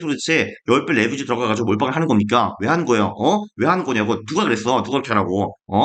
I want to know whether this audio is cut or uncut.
uncut